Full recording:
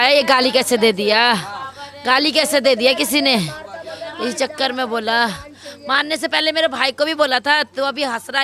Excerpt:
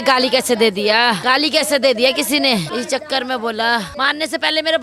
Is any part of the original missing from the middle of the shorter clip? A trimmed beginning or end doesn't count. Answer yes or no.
yes